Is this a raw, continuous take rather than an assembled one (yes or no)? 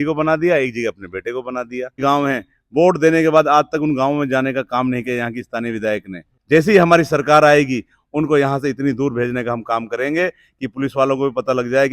no